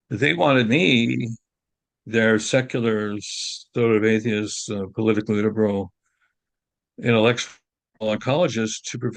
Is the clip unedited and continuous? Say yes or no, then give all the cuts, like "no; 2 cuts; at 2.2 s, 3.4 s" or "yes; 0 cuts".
yes; 0 cuts